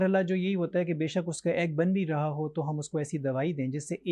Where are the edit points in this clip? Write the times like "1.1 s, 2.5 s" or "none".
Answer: none